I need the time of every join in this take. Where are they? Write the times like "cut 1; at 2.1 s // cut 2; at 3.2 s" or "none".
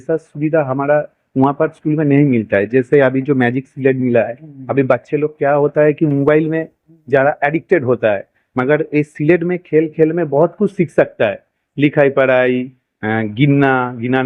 none